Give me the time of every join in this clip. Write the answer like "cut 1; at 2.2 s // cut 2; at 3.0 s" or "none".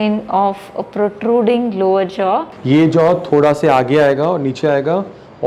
cut 1; at 2.5 s